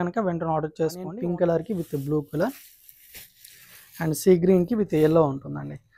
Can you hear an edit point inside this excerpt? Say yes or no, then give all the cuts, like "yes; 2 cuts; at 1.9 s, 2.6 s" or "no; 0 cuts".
yes; 1 cut; at 1.1 s